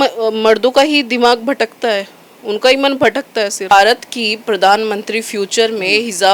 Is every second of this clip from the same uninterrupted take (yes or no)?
no